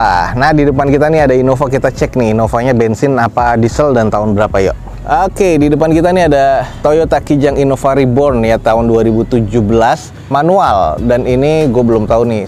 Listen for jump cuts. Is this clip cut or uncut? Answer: uncut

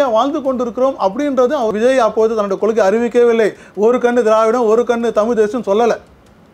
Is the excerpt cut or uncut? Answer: cut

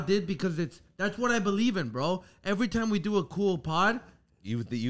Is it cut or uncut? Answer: uncut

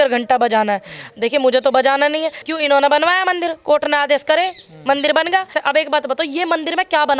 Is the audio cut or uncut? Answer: cut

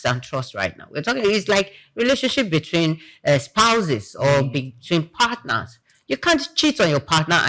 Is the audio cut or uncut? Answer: uncut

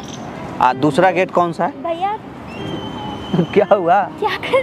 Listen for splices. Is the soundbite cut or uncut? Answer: uncut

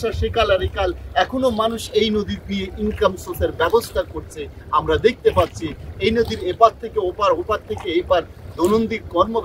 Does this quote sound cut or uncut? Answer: uncut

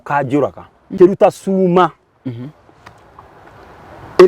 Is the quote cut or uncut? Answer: cut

